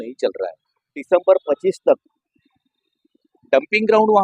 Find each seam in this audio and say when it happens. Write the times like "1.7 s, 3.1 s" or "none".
1.0 s